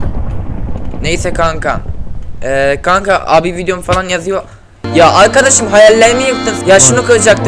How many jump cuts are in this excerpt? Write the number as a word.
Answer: one